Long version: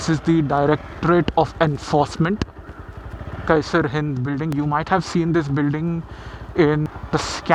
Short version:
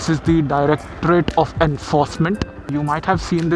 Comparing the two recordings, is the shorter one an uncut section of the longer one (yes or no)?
no